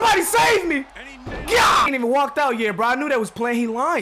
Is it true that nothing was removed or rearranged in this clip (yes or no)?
no